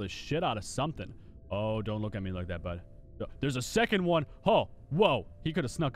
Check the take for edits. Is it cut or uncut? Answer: uncut